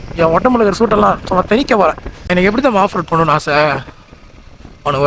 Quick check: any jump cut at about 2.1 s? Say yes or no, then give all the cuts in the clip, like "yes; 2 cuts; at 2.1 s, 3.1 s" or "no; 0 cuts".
yes; 1 cut; at 2.1 s